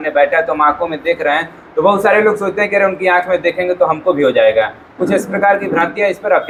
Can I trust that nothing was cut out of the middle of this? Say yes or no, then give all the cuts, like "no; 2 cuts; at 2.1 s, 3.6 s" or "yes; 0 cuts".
yes; 0 cuts